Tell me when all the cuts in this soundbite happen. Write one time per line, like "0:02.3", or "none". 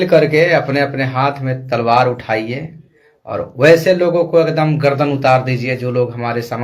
none